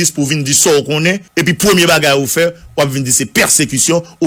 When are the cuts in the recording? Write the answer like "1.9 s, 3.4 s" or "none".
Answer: none